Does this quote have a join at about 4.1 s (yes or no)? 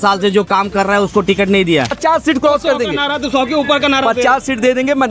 no